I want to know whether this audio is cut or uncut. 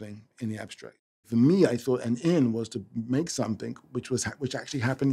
cut